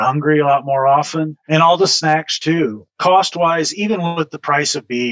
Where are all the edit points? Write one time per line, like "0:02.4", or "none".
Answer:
0:01.4
0:02.9